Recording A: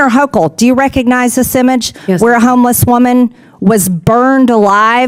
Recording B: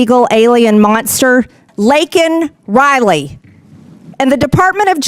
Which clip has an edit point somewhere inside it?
B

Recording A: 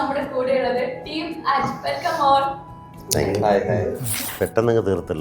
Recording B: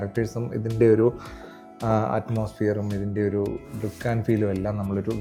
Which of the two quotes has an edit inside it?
A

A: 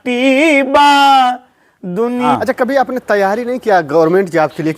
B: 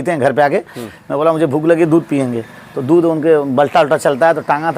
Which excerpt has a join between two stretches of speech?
A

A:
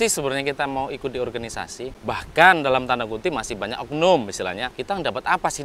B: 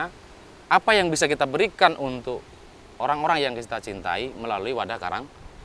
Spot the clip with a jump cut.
A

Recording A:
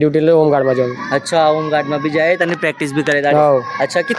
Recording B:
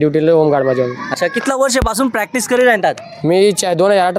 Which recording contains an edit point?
B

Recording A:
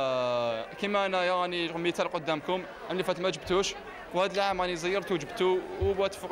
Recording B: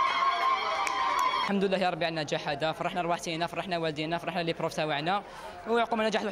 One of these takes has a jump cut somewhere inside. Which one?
B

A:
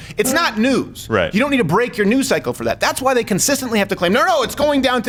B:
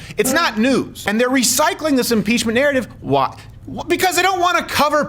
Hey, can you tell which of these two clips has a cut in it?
B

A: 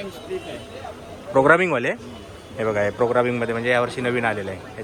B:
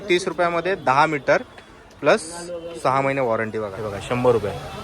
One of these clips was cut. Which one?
B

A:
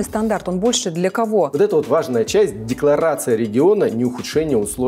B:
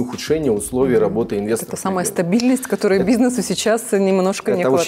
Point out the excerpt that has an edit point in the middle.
A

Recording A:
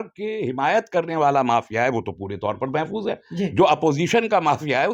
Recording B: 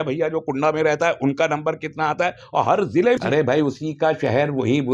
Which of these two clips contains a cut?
B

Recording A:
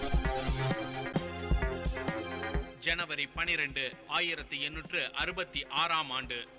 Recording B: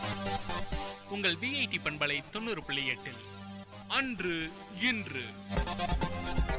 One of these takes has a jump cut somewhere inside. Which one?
A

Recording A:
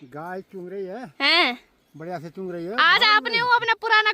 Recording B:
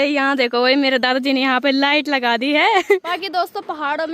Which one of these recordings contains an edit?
B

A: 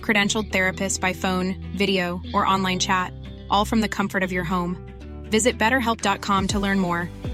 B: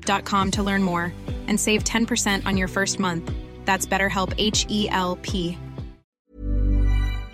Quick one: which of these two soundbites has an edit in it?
B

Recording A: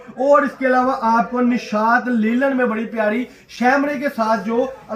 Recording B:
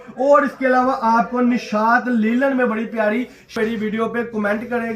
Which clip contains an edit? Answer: B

